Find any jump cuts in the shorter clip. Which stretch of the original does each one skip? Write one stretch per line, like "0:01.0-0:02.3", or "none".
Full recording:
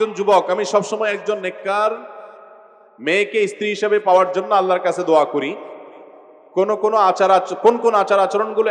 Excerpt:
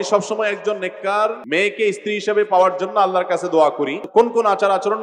0:02.0-0:03.0
0:05.6-0:07.5